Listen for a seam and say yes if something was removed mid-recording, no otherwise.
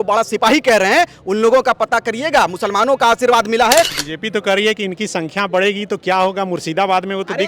yes